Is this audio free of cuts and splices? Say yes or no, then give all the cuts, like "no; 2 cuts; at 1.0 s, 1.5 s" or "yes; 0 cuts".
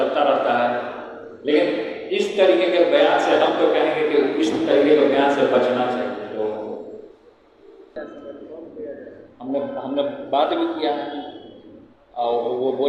no; 1 cut; at 8.0 s